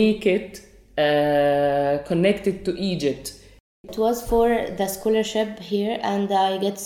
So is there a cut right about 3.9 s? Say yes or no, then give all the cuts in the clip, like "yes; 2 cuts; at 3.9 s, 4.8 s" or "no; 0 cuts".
yes; 1 cut; at 3.9 s